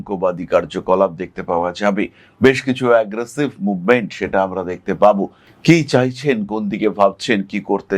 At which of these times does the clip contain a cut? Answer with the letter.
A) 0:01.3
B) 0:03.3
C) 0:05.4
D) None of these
C